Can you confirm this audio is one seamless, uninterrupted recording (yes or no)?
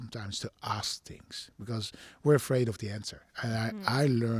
yes